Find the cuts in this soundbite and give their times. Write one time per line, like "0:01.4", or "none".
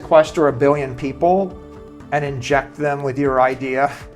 none